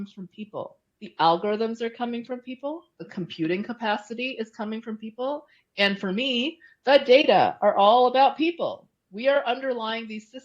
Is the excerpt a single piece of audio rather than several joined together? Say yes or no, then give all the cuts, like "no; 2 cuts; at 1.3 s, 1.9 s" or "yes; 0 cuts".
yes; 0 cuts